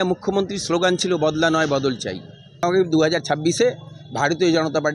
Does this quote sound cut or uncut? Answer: cut